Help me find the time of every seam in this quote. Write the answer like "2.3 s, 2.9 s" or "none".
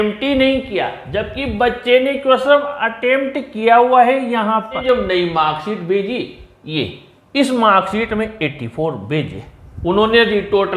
4.8 s